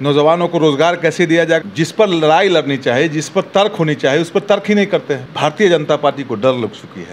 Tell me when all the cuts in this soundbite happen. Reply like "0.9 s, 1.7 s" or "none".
1.6 s, 5.3 s